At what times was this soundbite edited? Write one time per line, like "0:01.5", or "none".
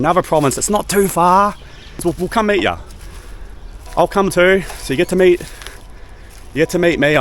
0:02.0

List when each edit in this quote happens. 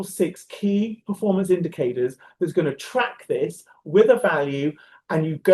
none

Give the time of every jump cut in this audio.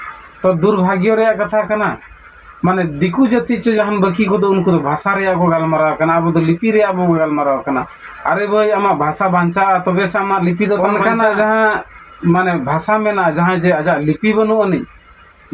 0:10.8

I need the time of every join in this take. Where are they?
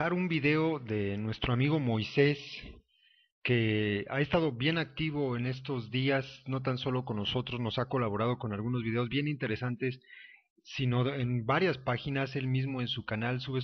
0:11.6

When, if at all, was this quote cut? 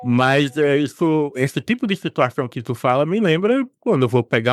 none

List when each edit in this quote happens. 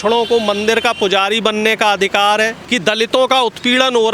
0:02.6

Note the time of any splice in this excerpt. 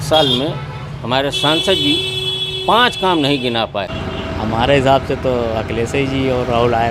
0:03.9

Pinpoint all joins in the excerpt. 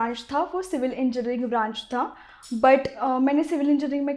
none

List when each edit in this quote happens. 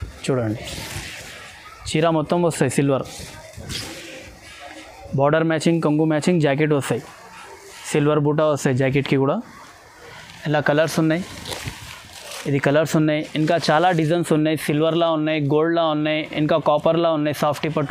none

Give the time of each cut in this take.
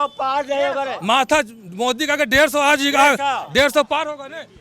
none

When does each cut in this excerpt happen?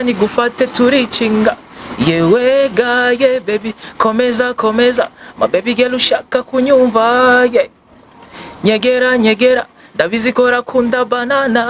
none

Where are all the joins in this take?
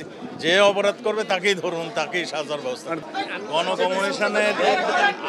0:03.0

